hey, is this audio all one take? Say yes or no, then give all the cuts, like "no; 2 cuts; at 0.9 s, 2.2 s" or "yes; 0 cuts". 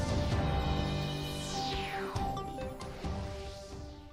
no; 1 cut; at 1.0 s